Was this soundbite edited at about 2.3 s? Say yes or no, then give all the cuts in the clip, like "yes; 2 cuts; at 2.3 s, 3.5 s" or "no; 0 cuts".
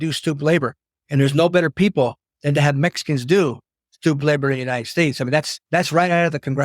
no; 1 cut; at 5.6 s